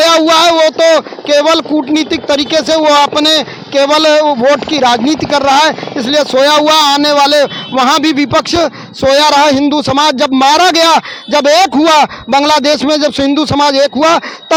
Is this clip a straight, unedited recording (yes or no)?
yes